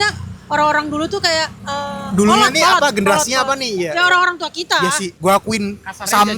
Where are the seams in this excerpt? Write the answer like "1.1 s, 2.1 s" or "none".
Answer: 1.6 s, 5.1 s